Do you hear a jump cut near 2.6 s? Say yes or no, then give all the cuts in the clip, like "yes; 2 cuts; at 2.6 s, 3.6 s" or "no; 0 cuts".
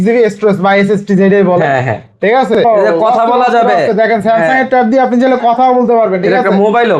yes; 1 cut; at 2.6 s